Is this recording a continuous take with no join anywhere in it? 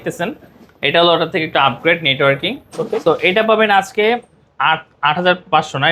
yes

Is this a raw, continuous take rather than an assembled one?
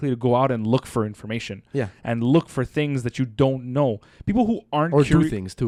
yes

